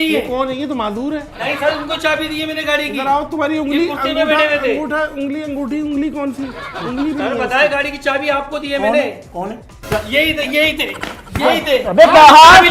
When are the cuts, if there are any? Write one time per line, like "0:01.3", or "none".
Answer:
none